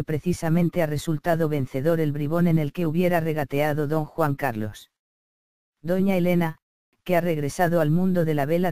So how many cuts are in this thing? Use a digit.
0